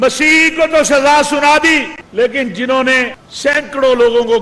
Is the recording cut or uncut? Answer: cut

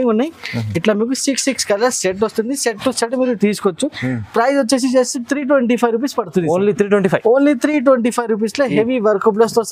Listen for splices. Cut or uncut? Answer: uncut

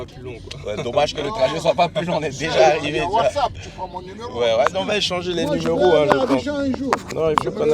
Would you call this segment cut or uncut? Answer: uncut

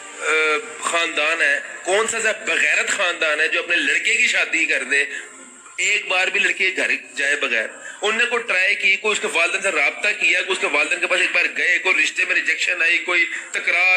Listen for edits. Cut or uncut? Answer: uncut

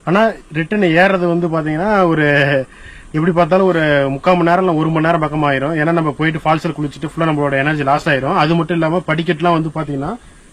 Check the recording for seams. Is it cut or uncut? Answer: uncut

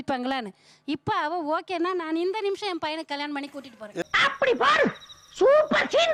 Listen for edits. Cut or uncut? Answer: uncut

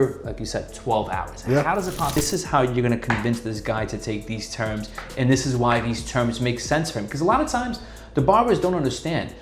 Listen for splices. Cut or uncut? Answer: cut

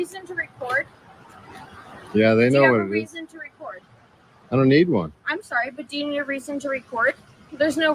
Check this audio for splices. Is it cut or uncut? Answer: uncut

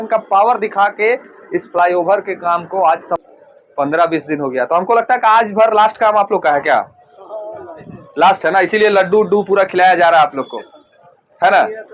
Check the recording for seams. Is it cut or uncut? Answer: cut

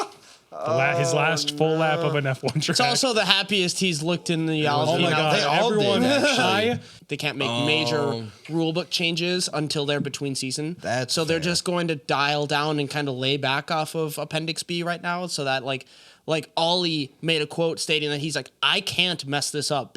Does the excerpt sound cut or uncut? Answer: cut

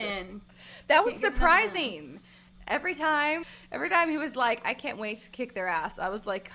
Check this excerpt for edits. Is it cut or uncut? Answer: uncut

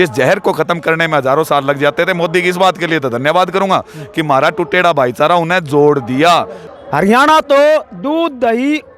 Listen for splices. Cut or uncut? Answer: cut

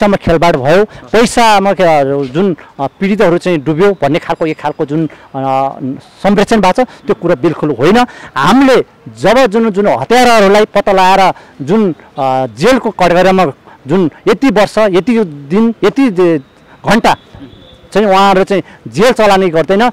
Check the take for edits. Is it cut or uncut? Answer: uncut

